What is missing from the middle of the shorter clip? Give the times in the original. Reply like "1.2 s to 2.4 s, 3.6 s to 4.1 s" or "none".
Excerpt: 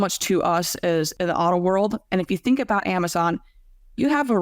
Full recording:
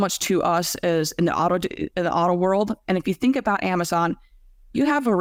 1.1 s to 1.9 s